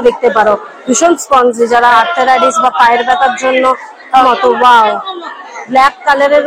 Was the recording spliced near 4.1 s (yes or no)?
yes